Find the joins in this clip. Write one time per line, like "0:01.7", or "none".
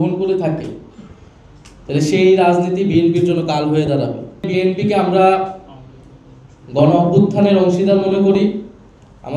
0:04.5

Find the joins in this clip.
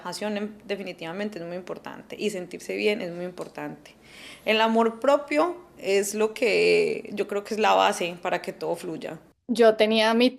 0:09.3

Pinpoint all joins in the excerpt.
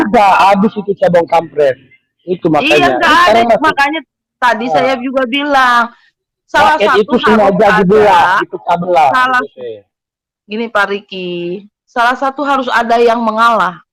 none

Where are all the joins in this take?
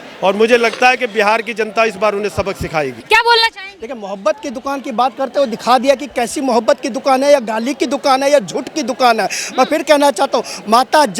0:03.0

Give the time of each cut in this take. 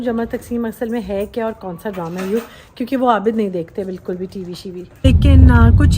0:05.0

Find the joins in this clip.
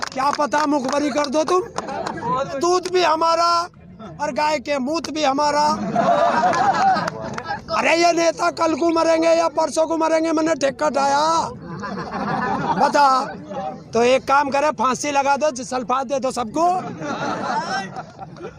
0:02.5
0:07.6
0:13.7

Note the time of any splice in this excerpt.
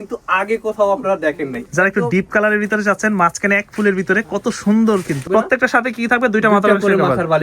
0:01.6
0:05.2

